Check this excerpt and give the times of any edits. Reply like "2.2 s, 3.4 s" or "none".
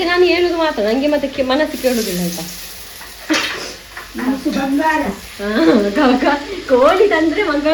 none